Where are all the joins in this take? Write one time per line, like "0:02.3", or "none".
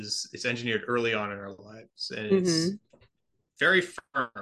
none

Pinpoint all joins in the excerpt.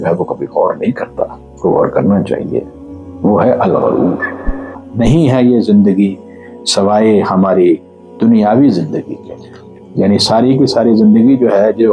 0:04.8

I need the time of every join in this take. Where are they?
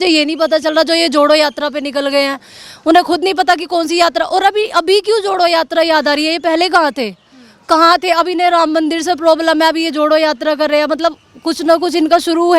none

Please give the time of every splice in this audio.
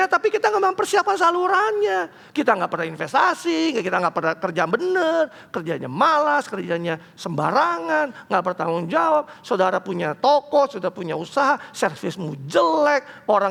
none

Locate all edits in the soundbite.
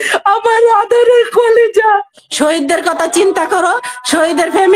0:02.1

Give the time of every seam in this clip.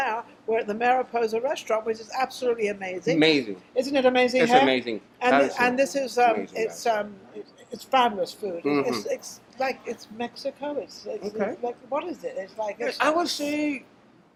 none

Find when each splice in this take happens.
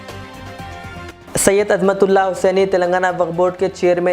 0:01.1

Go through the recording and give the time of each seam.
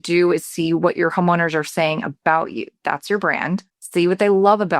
0:03.8

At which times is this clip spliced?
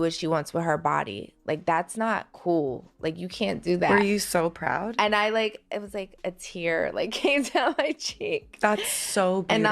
0:01.3

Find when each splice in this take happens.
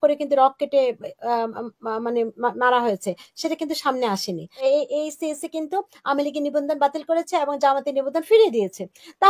0:04.5

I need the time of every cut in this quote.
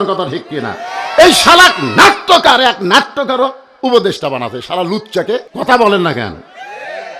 0:05.5

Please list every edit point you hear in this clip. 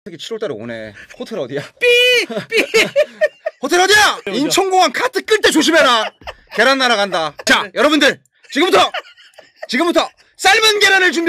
0:01.0

